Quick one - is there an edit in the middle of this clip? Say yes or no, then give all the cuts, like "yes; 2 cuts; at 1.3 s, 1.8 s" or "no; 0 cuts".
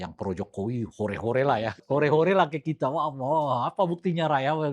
yes; 1 cut; at 1.7 s